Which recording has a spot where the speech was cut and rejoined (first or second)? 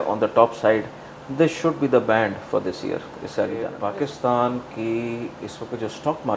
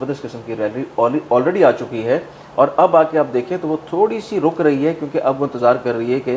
first